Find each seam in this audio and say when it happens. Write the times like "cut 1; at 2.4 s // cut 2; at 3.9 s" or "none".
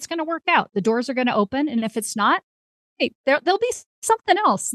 none